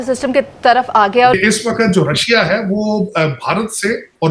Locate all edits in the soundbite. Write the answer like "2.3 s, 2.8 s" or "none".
1.3 s